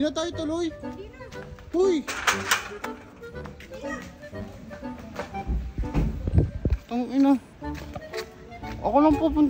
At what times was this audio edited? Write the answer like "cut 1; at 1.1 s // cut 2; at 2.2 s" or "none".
none

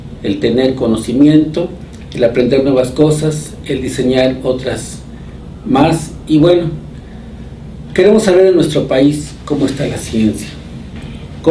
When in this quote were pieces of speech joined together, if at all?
cut 1; at 4.1 s

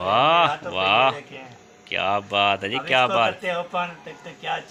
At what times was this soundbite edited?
none

